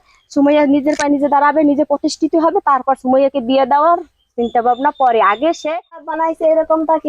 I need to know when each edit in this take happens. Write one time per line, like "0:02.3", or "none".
0:06.1